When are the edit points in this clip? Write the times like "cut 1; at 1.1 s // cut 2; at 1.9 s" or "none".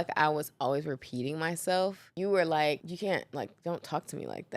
cut 1; at 2.1 s // cut 2; at 2.9 s